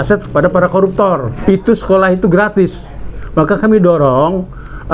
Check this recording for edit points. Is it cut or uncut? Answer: cut